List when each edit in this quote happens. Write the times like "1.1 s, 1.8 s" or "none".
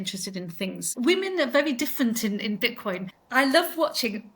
0.8 s, 3.1 s